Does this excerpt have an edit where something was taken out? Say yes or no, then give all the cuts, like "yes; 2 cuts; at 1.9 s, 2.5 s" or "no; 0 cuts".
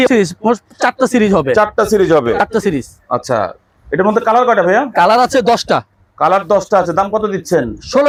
no; 0 cuts